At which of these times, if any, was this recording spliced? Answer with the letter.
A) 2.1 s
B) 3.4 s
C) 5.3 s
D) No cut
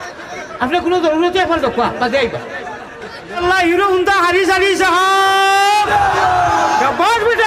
B